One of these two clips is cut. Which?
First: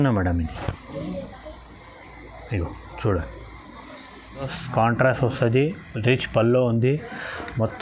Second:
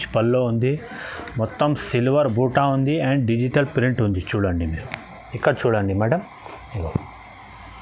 first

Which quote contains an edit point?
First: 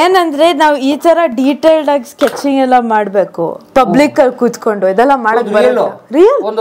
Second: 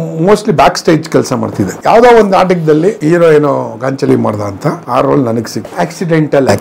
second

